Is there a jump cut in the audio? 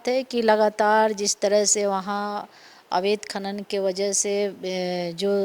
no; 0 cuts

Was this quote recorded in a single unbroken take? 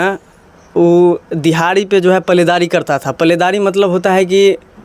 yes; 0 cuts

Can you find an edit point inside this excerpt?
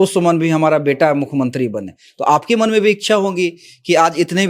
no; 0 cuts

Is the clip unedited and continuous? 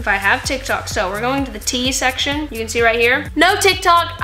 yes; 0 cuts

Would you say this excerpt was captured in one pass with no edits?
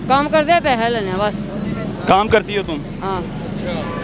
yes; 0 cuts

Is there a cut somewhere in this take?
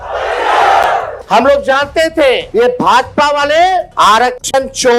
yes; 3 cuts; at 1.2 s, 2.4 s, 3.9 s

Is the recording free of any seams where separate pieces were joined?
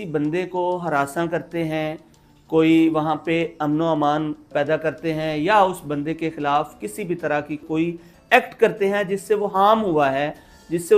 yes; 0 cuts

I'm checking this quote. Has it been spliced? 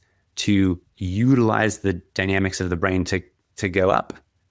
yes; 1 cut; at 0.9 s

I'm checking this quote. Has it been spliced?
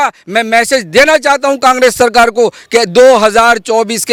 no; 0 cuts

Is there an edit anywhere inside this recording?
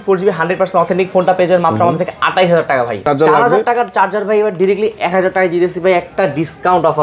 yes; 1 cut; at 3.0 s

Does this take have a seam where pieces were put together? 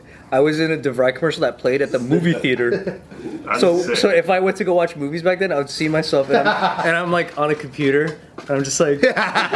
no; 0 cuts

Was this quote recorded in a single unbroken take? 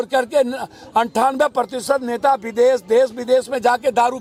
yes; 0 cuts

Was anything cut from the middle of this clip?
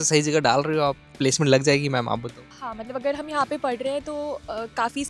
no; 0 cuts

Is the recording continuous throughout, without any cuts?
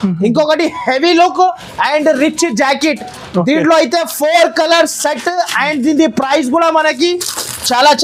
yes; 0 cuts

